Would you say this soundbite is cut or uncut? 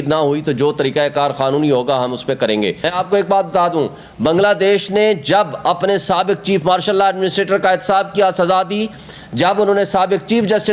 cut